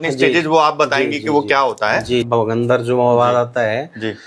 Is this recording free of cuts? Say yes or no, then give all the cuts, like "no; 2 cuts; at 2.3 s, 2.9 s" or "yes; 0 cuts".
no; 1 cut; at 2.3 s